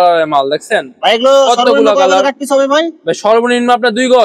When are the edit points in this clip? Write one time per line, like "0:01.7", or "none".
none